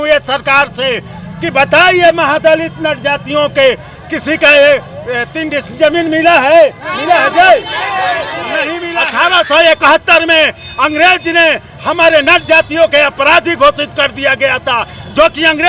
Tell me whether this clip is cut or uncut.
cut